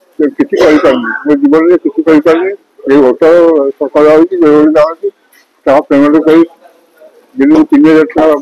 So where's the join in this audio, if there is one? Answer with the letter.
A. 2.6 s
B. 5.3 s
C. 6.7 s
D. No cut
D